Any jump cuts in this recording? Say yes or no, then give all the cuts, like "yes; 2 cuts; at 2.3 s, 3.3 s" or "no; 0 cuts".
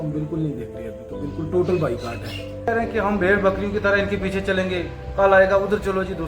yes; 1 cut; at 2.7 s